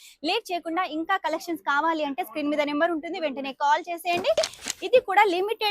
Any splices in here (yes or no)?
yes